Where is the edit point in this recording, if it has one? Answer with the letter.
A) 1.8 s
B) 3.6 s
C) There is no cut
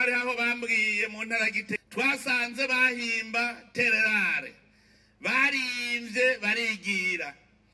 A